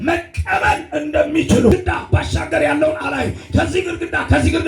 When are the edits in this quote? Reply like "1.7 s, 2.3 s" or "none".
1.7 s